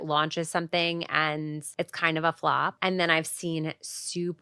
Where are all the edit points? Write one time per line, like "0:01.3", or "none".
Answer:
0:01.6
0:02.8